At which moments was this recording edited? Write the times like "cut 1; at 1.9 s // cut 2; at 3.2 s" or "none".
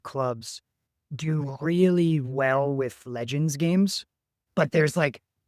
cut 1; at 4.4 s